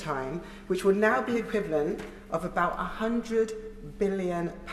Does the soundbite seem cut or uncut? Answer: uncut